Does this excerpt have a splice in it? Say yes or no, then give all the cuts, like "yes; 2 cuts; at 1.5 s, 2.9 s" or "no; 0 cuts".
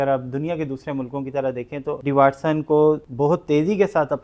yes; 2 cuts; at 2.0 s, 3.1 s